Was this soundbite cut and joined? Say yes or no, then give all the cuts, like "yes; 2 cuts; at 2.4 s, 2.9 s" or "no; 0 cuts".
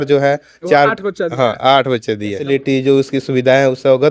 yes; 1 cut; at 2.4 s